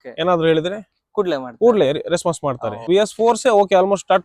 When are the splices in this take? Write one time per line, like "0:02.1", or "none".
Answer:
0:02.9